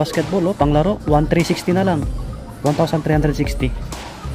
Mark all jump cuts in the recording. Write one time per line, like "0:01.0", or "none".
none